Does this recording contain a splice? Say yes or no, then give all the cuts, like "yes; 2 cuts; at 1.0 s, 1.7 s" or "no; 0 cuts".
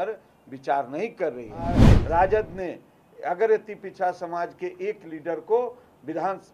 yes; 1 cut; at 1.9 s